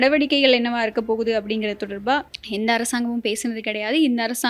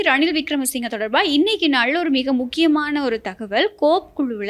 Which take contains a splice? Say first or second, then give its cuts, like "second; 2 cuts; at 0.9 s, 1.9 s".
first; 1 cut; at 2.4 s